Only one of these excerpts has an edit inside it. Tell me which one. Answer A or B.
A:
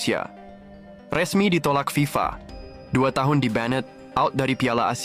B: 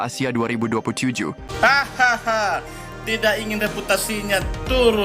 B